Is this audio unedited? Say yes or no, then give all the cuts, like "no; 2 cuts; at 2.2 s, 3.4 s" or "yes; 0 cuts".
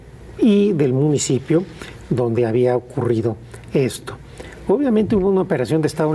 yes; 0 cuts